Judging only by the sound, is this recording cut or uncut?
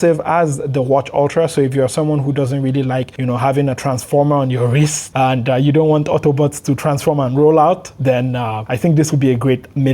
cut